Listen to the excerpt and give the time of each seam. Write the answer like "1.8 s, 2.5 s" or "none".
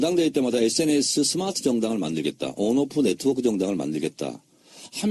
3.1 s